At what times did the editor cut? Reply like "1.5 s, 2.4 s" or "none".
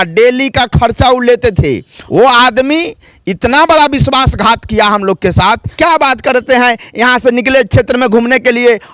1.9 s, 5.7 s